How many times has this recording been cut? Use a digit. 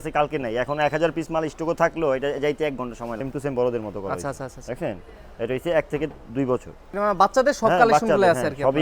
2